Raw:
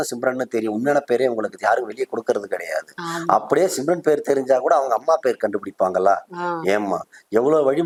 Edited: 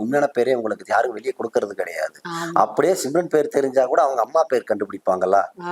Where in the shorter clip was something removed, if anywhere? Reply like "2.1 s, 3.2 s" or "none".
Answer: none